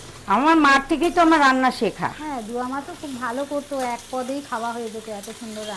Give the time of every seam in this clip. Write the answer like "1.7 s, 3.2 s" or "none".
none